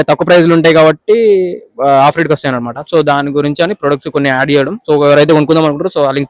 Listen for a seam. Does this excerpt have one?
no; 0 cuts

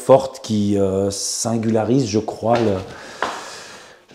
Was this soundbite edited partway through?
no; 0 cuts

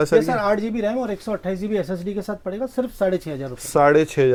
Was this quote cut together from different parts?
no; 0 cuts

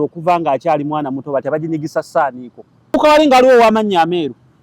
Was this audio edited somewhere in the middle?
yes; 1 cut; at 2.9 s

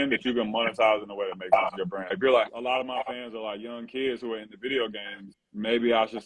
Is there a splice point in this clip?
yes; 1 cut; at 2.1 s

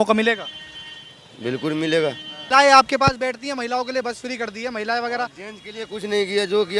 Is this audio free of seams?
no; 1 cut; at 2.4 s

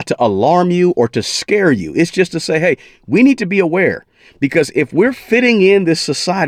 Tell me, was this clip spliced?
no; 0 cuts

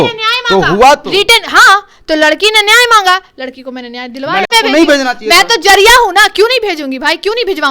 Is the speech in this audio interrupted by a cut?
yes; 1 cut; at 4.5 s

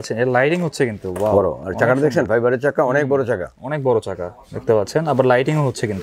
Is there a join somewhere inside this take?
no; 0 cuts

